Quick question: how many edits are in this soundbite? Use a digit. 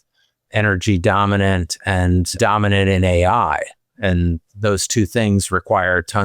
1